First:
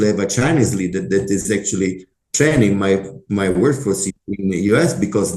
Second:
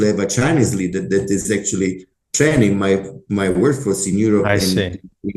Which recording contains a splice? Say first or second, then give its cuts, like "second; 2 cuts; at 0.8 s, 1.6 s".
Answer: first; 1 cut; at 4.1 s